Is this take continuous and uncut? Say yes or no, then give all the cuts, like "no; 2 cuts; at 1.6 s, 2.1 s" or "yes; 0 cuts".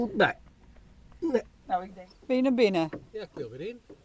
no; 1 cut; at 1.9 s